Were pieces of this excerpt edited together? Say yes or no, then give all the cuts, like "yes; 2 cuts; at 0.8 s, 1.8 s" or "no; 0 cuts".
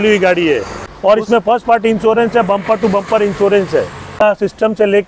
yes; 2 cuts; at 1.1 s, 4.2 s